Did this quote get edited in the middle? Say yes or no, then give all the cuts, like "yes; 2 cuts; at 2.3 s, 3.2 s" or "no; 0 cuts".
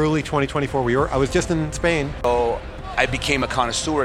yes; 1 cut; at 2.2 s